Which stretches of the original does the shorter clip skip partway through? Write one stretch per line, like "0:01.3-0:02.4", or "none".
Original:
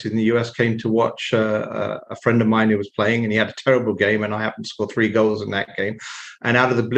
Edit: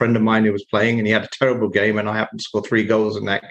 none